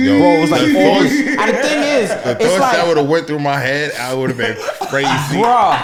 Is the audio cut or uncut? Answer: uncut